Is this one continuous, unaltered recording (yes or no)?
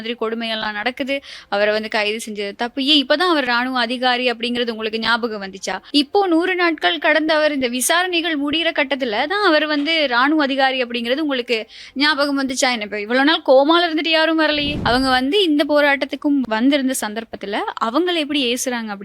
no